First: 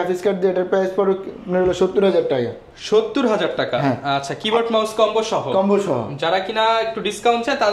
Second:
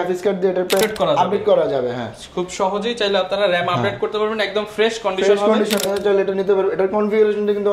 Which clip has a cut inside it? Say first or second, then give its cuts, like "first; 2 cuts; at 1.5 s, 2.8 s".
second; 2 cuts; at 0.8 s, 5.8 s